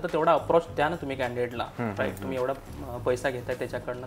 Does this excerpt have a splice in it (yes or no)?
no